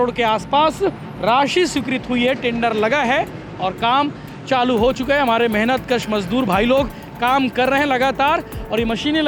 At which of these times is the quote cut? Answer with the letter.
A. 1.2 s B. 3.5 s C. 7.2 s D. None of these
D